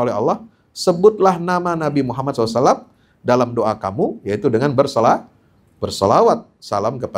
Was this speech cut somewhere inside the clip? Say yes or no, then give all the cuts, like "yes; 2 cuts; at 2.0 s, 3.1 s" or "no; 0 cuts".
no; 0 cuts